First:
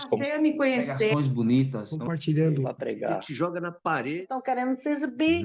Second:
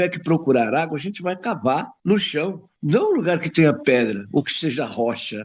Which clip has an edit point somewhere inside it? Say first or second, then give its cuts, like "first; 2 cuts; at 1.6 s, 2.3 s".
second; 2 cuts; at 1.9 s, 2.7 s